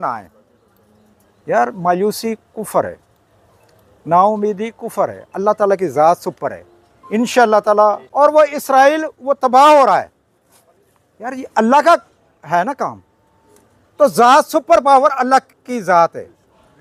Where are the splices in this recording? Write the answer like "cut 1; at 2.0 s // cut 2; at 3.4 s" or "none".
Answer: cut 1; at 8.0 s